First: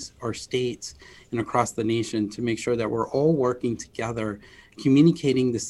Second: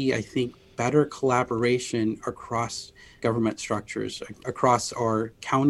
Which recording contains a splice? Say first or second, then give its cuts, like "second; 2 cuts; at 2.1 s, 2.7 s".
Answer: second; 2 cuts; at 3.2 s, 4.4 s